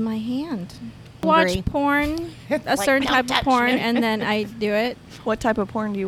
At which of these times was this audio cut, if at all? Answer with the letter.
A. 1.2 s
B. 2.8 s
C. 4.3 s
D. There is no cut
A